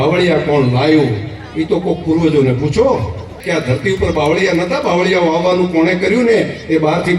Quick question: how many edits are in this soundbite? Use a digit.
1